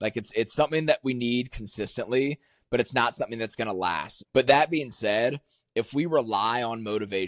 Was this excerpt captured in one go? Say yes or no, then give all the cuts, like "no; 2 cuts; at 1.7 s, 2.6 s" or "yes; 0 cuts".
no; 1 cut; at 4.1 s